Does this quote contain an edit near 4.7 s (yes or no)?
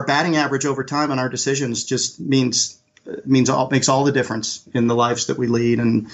yes